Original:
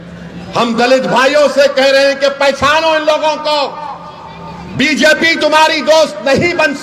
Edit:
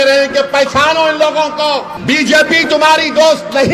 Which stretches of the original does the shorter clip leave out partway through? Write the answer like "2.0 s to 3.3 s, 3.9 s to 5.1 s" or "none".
3.8 s to 4.6 s